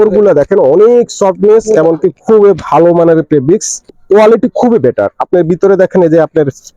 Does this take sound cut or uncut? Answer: cut